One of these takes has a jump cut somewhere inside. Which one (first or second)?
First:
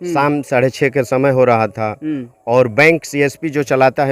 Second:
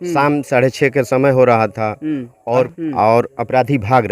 second